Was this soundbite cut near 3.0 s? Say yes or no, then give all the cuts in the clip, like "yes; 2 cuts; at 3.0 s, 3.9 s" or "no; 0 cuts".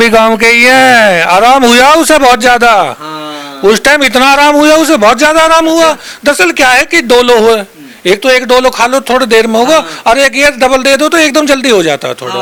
no; 0 cuts